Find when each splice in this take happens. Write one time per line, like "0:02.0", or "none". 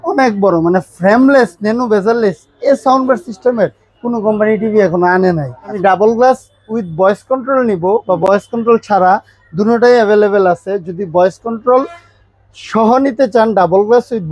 0:05.8